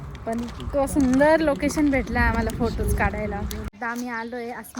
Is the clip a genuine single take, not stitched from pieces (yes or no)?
no